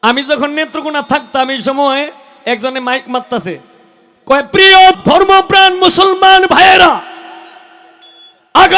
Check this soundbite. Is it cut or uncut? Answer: uncut